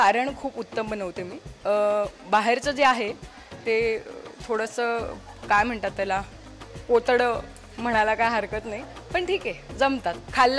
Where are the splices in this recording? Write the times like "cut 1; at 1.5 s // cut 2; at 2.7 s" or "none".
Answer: none